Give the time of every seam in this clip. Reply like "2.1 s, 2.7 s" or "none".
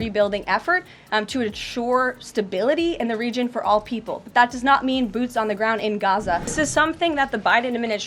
6.4 s